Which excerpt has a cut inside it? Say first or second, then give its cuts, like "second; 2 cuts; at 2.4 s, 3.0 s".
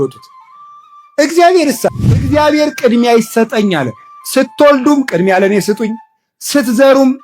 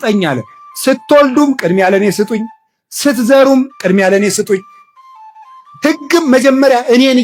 first; 1 cut; at 2.2 s